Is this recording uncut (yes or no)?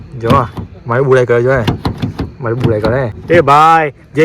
no